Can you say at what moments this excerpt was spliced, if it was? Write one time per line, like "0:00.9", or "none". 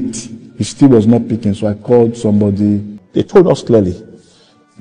0:03.0